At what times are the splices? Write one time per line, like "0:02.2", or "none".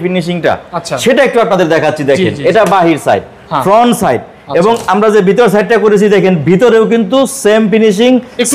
none